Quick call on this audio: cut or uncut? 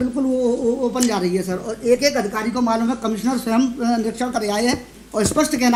uncut